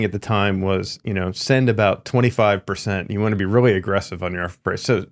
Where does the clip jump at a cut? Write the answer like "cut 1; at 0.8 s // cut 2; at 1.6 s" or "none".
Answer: none

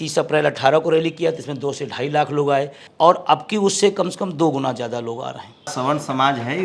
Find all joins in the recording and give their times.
cut 1; at 2.8 s // cut 2; at 5.7 s

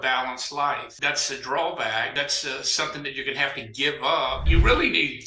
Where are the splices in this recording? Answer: cut 1; at 0.9 s // cut 2; at 2.1 s // cut 3; at 4.4 s

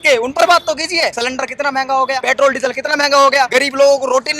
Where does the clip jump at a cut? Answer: cut 1; at 1.2 s // cut 2; at 2.2 s // cut 3; at 3.5 s

